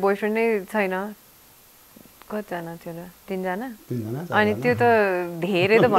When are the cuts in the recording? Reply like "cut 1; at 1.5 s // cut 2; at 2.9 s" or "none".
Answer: none